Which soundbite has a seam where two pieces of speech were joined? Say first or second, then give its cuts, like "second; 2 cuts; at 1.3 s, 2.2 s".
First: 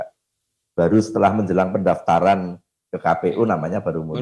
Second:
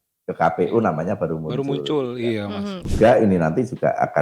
second; 1 cut; at 2.9 s